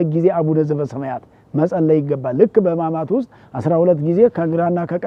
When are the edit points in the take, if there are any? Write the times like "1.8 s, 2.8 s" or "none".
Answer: none